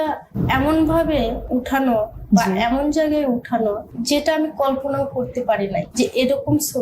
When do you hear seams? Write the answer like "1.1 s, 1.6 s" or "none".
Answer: 1.4 s, 3.9 s, 5.9 s